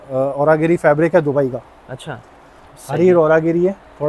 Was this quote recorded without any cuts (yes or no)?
yes